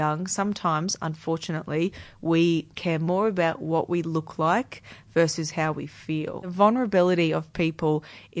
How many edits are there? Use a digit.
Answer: 2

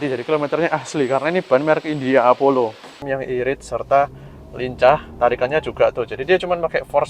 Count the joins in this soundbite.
1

